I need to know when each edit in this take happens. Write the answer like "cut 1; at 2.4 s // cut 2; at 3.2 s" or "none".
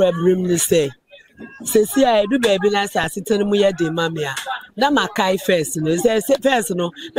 none